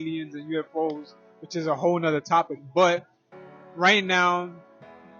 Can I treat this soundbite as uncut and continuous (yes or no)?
yes